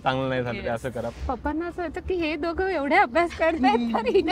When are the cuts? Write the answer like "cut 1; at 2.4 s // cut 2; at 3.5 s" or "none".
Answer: cut 1; at 1.1 s